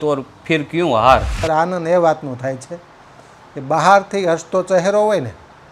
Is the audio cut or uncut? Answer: cut